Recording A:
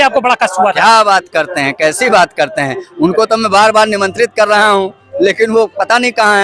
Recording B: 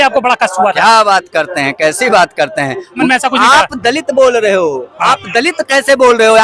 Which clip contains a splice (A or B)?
B